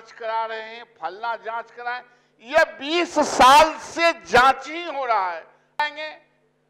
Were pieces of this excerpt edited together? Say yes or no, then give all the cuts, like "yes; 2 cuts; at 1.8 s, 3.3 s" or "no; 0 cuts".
yes; 1 cut; at 5.8 s